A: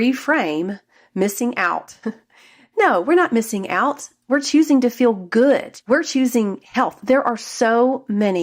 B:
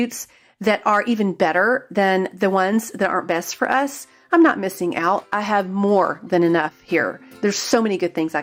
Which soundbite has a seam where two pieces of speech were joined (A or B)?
A